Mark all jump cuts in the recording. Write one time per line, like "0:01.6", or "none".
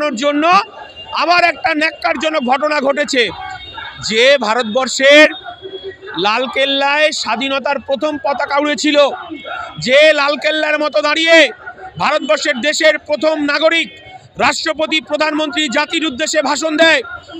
none